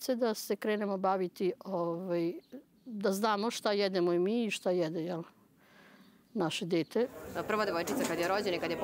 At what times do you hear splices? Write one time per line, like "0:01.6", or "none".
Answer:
0:07.4